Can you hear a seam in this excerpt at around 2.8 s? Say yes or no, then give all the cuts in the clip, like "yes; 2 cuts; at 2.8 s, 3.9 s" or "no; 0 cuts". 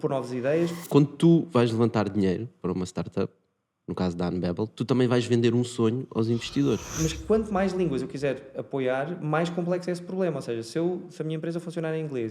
no; 2 cuts; at 0.8 s, 6.9 s